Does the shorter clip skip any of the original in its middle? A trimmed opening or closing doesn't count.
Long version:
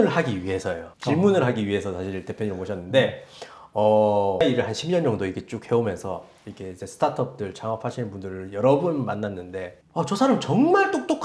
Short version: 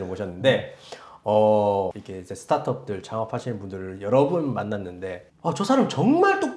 yes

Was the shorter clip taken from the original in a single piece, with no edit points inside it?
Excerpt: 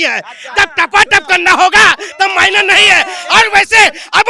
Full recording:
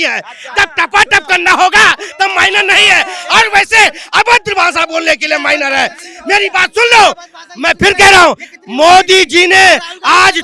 yes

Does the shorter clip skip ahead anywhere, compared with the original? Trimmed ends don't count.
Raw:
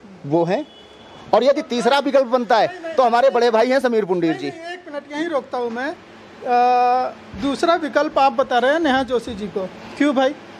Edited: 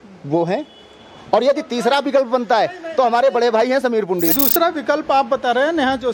yes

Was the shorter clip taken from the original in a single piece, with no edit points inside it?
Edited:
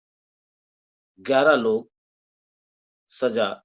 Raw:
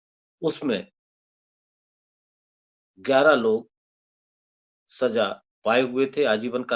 yes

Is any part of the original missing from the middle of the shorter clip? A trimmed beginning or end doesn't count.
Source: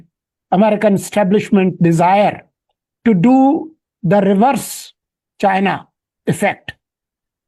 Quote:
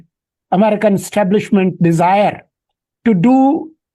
no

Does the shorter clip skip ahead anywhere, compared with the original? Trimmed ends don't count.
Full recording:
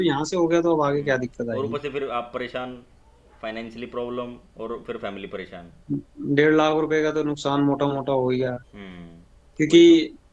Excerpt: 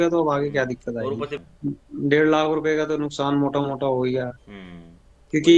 yes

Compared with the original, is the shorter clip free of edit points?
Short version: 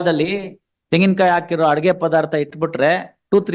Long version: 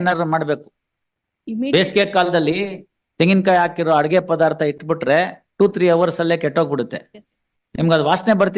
yes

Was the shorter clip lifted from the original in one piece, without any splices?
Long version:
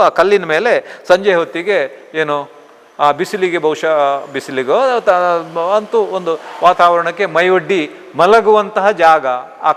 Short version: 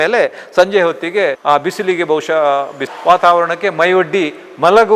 no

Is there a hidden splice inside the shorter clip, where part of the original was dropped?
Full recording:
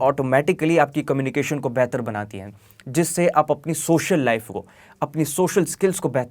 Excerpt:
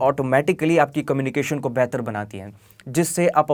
no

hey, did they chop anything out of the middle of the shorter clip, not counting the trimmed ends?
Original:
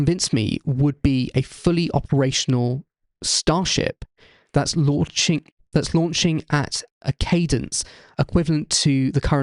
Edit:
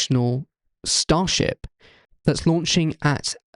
yes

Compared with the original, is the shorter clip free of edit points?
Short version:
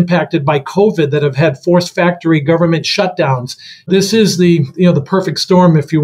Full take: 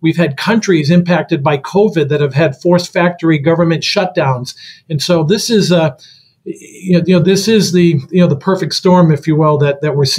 no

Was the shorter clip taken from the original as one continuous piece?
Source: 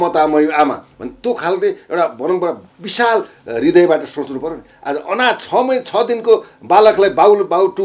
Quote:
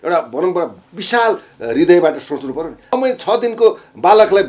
no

